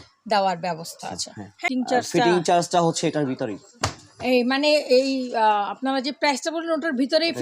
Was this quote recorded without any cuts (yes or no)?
no